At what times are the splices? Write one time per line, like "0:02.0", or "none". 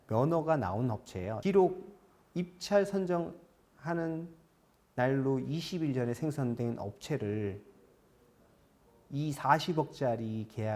0:01.3